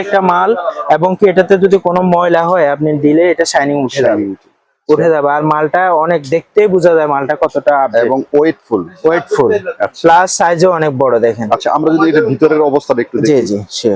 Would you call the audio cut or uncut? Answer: uncut